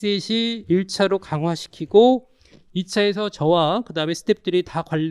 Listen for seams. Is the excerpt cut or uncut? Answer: uncut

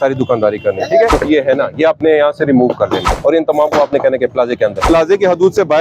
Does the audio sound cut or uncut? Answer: cut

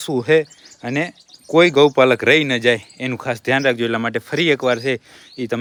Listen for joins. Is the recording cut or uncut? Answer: uncut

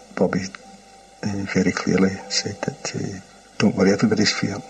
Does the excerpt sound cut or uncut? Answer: uncut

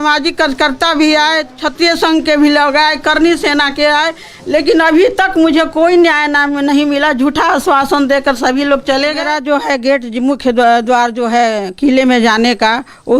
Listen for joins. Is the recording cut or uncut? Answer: cut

